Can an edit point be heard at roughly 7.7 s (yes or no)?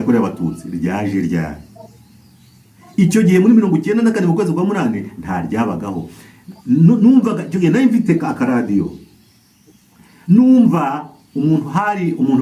no